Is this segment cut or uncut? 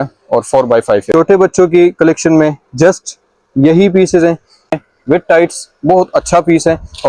cut